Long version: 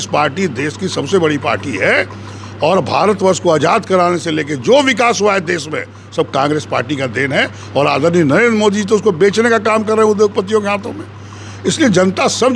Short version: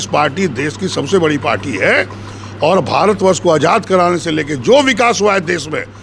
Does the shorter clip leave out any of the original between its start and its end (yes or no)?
no